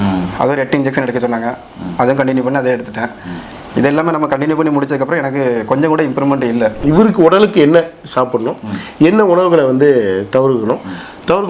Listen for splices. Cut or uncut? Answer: cut